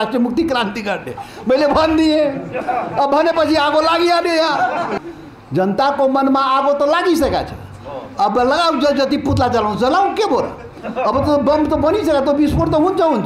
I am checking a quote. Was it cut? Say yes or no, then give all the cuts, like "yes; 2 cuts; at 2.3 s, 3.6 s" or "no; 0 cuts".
yes; 1 cut; at 5.0 s